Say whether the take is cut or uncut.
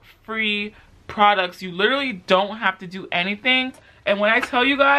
cut